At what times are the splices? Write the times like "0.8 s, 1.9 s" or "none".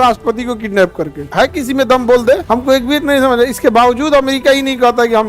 1.2 s, 2.4 s

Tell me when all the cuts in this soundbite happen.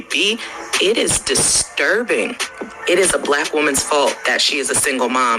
1.0 s

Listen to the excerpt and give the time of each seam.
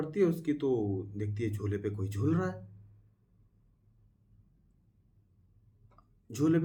none

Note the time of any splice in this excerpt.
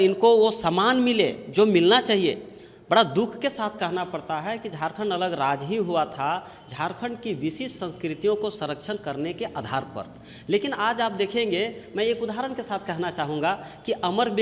none

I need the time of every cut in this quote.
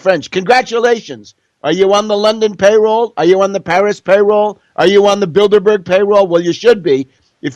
2.7 s

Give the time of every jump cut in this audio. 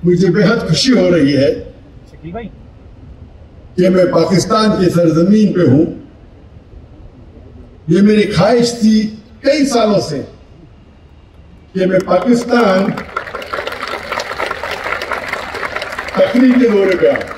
none

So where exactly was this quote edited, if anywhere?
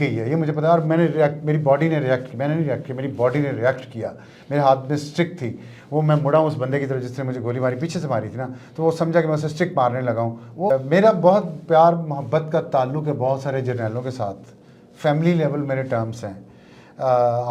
10.7 s

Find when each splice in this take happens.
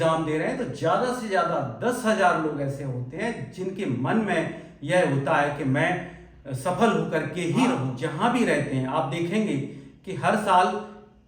8.0 s

